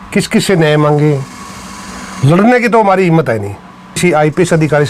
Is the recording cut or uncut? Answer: cut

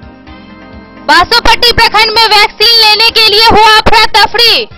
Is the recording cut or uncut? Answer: cut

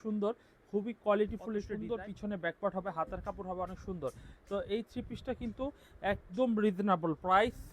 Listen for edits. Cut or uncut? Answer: cut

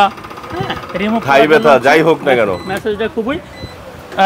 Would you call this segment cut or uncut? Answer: uncut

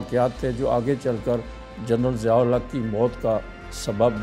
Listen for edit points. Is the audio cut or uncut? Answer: uncut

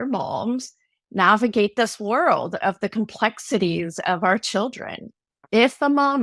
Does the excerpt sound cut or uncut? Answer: cut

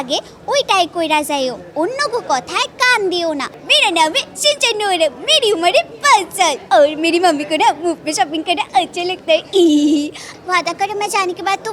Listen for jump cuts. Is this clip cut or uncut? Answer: cut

